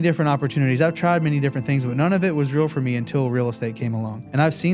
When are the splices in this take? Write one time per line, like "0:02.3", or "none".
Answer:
none